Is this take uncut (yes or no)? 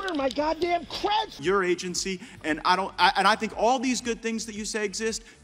no